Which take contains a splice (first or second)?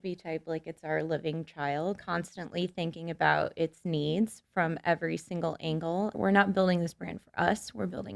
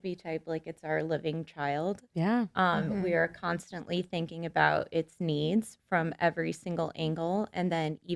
first